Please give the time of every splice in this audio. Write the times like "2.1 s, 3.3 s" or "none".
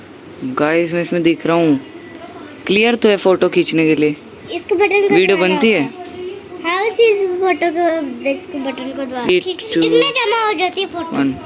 none